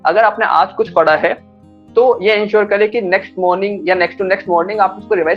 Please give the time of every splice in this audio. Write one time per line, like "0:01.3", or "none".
none